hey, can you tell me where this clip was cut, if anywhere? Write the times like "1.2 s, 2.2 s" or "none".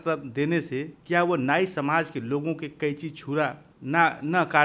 0.9 s, 3.7 s